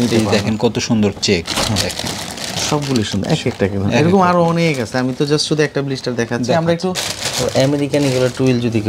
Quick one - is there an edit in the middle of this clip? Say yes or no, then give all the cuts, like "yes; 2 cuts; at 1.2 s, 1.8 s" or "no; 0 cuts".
yes; 1 cut; at 7.0 s